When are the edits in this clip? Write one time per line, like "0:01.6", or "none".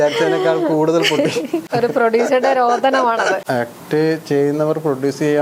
0:01.7
0:03.4